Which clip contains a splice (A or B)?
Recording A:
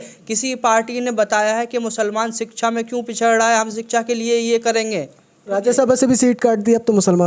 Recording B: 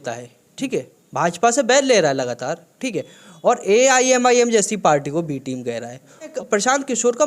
B